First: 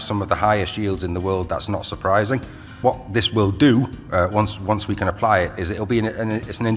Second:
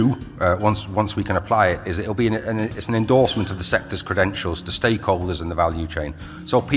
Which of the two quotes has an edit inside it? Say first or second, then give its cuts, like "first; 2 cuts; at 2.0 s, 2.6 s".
first; 1 cut; at 2.7 s